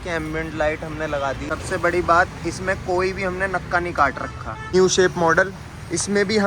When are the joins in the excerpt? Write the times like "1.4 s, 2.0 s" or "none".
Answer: 1.4 s, 4.7 s